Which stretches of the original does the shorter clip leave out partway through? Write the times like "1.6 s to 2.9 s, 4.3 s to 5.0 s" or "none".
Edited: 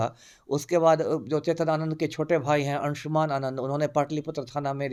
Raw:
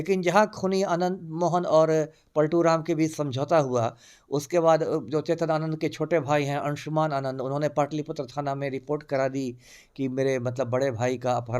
none